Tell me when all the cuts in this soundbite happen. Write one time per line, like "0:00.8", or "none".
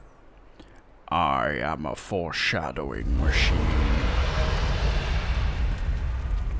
none